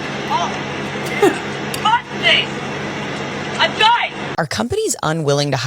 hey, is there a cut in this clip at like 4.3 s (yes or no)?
yes